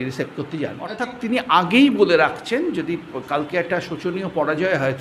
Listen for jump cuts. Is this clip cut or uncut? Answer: cut